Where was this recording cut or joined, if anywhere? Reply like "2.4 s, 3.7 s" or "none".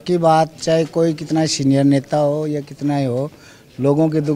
none